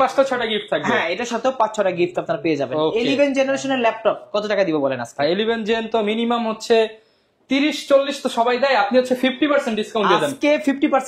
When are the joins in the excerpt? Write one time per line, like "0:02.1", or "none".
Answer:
none